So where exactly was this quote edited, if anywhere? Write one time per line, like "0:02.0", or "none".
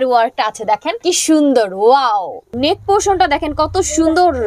0:00.9
0:02.5